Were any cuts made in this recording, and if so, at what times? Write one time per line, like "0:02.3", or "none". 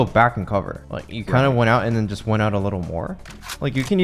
0:03.1